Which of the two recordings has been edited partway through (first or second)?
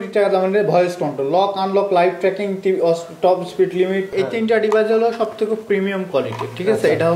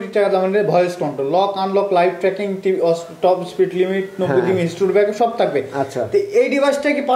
first